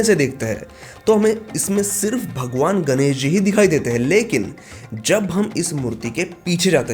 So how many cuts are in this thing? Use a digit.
0